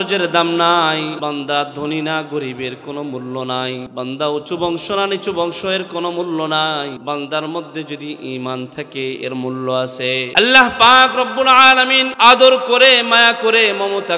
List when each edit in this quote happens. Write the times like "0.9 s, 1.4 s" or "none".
1.2 s, 3.9 s, 7.0 s, 10.3 s, 12.1 s